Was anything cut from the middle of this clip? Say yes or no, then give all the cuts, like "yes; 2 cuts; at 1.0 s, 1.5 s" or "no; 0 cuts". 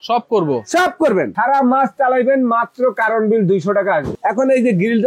yes; 2 cuts; at 1.3 s, 4.1 s